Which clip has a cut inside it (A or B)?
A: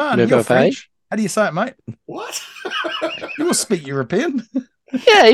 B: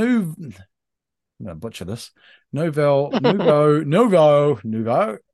A